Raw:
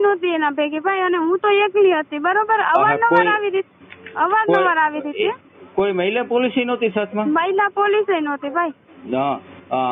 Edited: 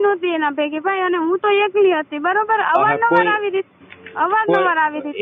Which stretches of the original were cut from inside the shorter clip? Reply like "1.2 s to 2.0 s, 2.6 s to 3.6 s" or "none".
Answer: none